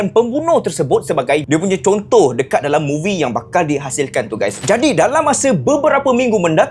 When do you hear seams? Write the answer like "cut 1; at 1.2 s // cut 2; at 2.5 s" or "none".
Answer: cut 1; at 1.4 s // cut 2; at 4.6 s